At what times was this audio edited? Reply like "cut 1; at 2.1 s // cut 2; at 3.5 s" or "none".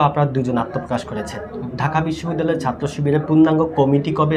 none